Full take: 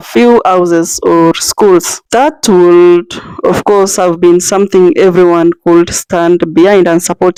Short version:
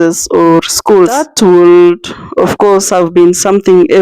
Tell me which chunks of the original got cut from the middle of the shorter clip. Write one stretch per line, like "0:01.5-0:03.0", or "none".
0:01.9-0:02.3